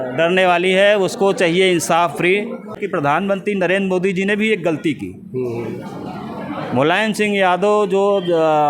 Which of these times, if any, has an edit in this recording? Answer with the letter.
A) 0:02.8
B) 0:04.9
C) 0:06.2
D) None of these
A